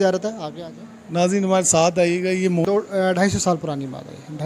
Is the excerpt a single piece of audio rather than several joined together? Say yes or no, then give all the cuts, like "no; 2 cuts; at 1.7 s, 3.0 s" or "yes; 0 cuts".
no; 1 cut; at 2.6 s